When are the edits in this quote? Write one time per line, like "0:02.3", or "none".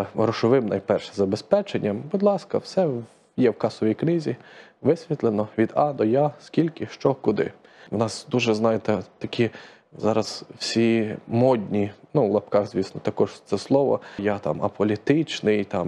0:07.8
0:14.2